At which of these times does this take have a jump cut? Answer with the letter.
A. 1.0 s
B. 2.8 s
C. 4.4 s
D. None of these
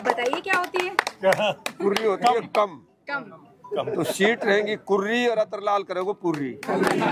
D